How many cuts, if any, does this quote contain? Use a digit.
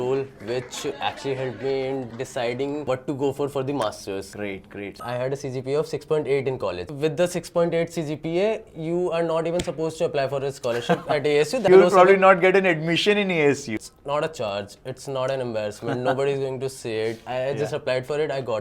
4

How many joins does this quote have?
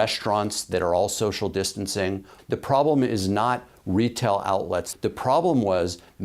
2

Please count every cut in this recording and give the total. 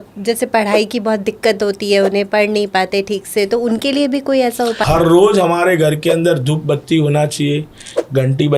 1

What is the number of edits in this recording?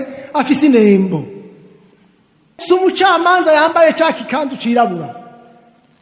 1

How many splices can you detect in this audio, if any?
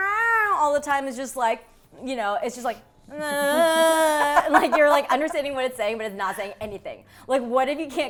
0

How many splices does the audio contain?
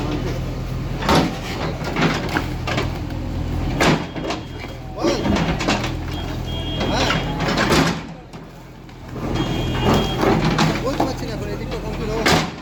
0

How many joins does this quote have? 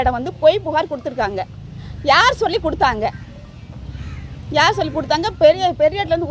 0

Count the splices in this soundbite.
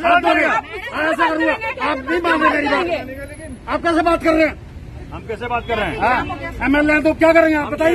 1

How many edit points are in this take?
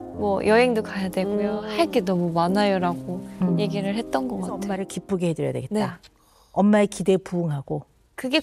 1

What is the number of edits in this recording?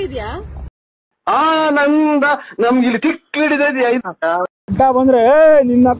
1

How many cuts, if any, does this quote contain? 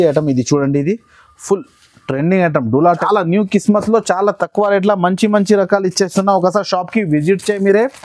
1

